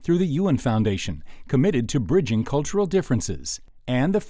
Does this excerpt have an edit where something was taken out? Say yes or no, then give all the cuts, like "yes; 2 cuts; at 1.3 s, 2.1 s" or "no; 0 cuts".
no; 0 cuts